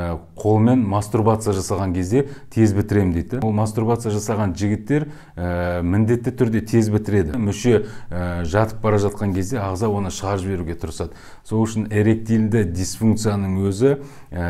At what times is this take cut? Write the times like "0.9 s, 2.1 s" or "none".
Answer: 3.4 s, 7.4 s